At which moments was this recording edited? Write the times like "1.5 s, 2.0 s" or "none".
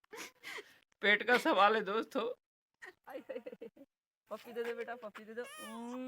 3.0 s